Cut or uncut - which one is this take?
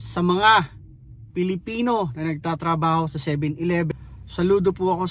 cut